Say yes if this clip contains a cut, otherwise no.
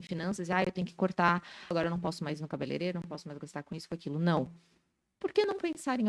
yes